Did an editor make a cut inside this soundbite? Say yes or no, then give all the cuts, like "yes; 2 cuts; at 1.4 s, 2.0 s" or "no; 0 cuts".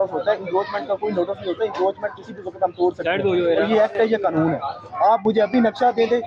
no; 0 cuts